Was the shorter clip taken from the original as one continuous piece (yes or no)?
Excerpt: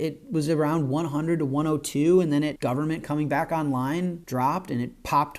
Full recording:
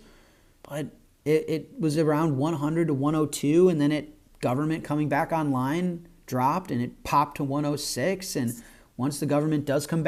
no